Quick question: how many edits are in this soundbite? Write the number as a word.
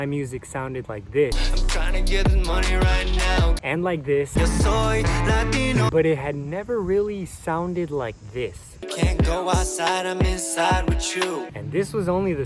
three